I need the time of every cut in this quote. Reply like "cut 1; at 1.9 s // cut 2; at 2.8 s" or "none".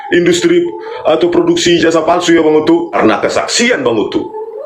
cut 1; at 2.9 s